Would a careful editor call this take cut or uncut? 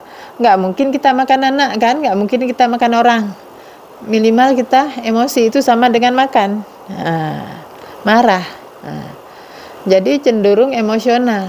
uncut